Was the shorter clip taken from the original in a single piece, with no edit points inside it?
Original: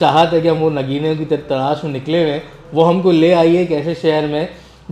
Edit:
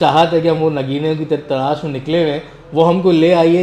yes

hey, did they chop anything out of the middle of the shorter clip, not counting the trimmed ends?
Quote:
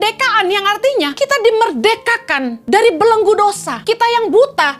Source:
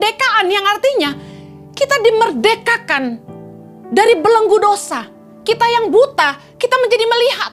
yes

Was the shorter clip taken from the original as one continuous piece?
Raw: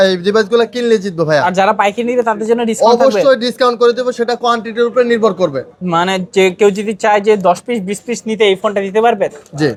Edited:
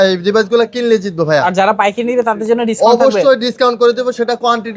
yes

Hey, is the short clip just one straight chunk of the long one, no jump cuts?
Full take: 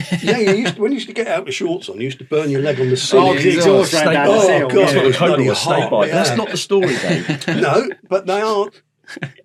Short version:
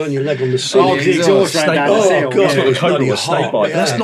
yes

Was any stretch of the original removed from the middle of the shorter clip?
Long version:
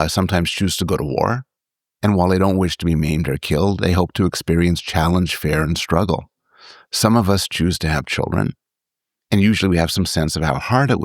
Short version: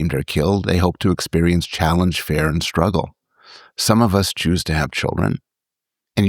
no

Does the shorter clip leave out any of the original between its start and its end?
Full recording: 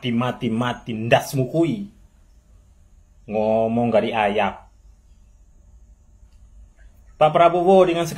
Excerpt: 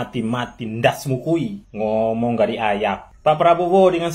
yes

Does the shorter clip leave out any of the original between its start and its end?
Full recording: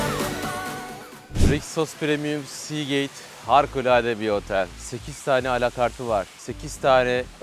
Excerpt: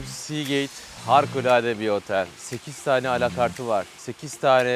no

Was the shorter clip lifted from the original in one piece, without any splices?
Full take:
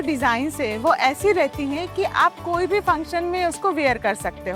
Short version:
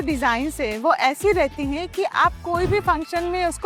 yes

